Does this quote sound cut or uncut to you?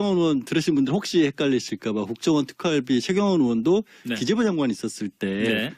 uncut